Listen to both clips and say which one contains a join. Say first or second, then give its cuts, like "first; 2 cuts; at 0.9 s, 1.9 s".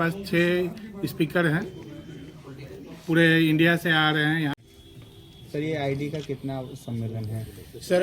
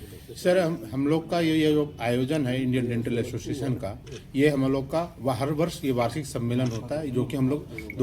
first; 1 cut; at 4.6 s